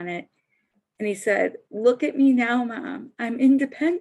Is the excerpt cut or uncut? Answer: uncut